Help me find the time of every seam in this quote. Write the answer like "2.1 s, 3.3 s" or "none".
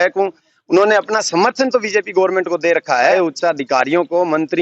3.1 s